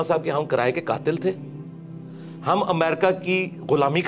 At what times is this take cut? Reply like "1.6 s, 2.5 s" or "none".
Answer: none